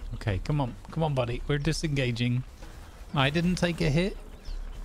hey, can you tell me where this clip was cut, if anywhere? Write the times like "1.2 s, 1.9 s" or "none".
3.1 s